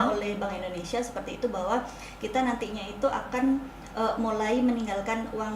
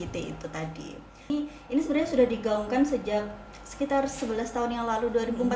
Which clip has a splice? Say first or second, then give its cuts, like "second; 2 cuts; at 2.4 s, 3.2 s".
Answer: second; 1 cut; at 1.3 s